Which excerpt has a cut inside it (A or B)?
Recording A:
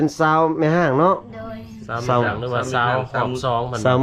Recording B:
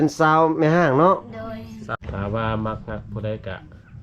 B